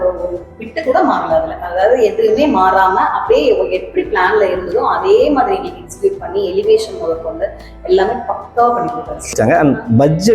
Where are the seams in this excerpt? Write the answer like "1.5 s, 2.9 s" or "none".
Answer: 9.3 s